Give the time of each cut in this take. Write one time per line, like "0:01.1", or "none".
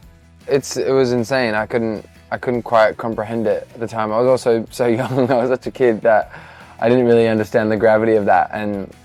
none